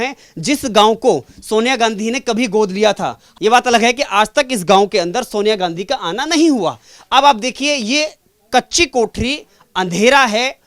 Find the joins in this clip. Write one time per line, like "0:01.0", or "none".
0:03.3